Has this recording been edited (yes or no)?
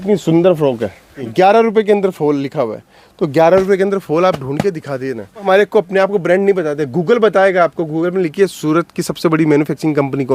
yes